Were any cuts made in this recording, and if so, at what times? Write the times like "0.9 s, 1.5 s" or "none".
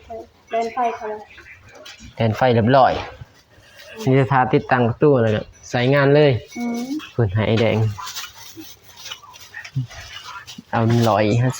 none

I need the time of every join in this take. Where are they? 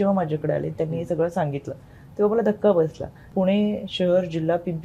3.3 s

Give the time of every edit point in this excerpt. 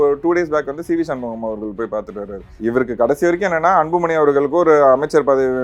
2.4 s

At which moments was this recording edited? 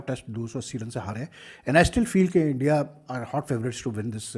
none

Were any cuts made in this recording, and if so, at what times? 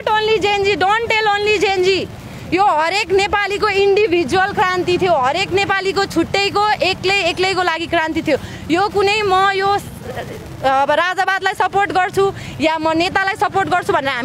none

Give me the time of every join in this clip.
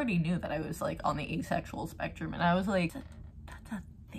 2.9 s

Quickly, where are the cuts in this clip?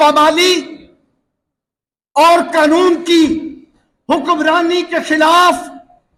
none

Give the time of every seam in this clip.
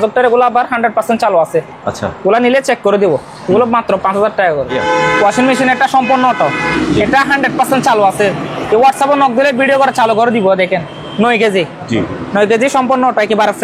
4.7 s

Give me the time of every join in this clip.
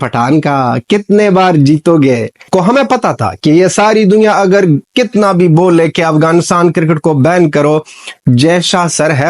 2.4 s

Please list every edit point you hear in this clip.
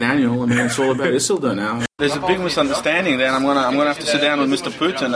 1.9 s

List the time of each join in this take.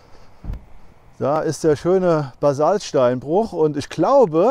none

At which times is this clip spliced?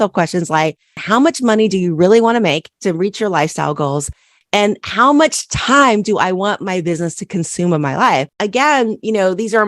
1.0 s, 2.7 s, 8.3 s

